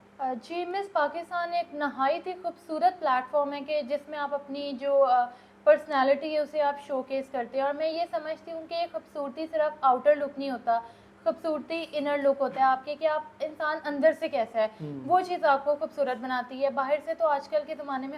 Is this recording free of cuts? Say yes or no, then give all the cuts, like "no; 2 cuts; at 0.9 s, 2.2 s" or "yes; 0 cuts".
yes; 0 cuts